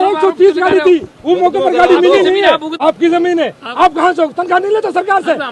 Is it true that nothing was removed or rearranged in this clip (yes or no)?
no